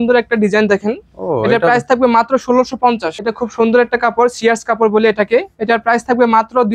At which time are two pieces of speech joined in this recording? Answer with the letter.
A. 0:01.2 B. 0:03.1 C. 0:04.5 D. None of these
B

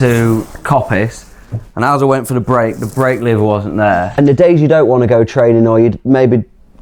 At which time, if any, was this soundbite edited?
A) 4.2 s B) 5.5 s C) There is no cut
A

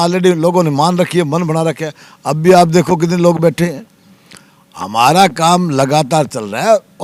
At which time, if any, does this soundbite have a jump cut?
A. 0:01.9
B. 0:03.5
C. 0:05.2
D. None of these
D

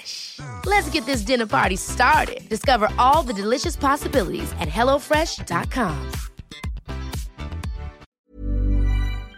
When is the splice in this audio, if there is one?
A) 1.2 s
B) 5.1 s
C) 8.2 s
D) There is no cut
C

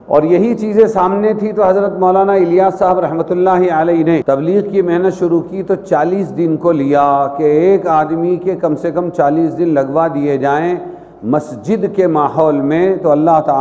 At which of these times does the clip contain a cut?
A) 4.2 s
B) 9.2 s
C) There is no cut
A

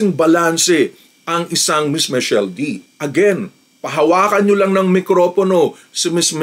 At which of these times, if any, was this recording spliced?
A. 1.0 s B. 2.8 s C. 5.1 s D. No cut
B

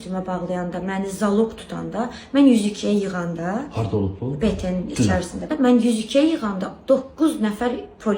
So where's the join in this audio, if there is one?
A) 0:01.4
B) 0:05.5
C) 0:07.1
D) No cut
B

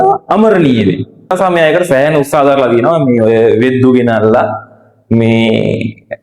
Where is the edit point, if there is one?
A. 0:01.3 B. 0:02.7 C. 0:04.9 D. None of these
A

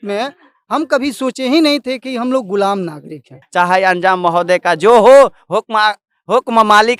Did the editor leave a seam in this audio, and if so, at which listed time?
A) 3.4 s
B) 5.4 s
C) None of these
A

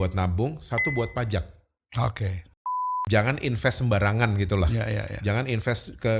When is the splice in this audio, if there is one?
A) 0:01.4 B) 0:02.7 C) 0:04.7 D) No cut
B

